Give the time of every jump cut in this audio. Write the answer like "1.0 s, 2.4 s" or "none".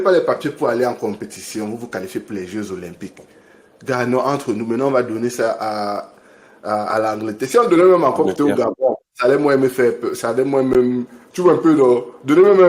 none